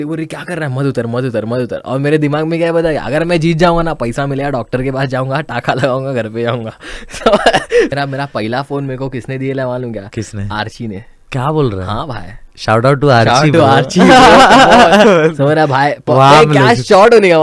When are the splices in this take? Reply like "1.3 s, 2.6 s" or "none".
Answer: 7.9 s, 15.0 s